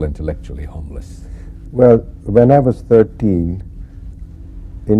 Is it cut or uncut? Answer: cut